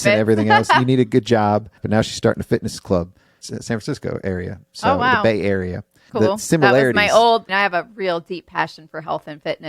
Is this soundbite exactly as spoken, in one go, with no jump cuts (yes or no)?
no